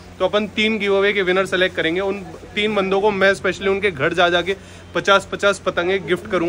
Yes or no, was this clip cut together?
no